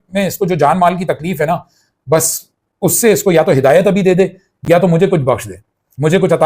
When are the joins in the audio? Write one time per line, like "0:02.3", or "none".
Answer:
none